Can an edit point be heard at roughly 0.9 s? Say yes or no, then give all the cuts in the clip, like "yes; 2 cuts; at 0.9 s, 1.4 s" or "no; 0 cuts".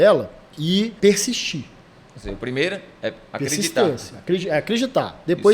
yes; 1 cut; at 0.9 s